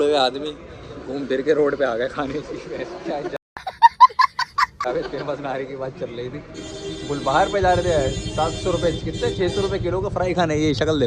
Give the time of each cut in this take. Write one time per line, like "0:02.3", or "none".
none